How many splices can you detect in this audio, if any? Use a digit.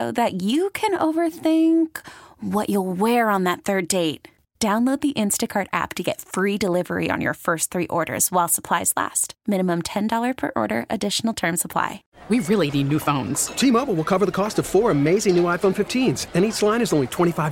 1